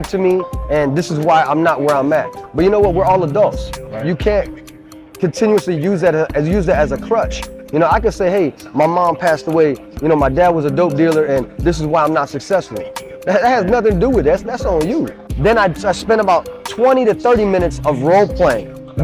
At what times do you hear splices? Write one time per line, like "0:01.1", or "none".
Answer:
0:15.2